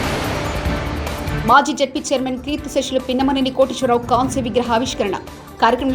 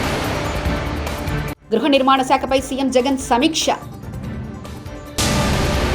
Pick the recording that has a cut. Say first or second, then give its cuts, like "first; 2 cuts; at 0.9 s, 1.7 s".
first; 1 cut; at 1.0 s